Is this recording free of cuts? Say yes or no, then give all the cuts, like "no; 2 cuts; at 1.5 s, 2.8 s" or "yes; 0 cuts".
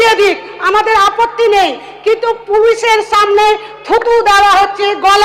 yes; 0 cuts